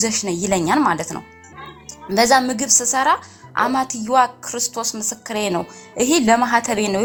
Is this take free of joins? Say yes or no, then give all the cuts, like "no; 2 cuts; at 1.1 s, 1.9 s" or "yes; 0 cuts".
yes; 0 cuts